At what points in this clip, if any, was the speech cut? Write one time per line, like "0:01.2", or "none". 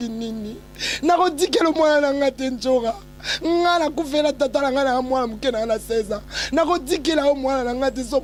none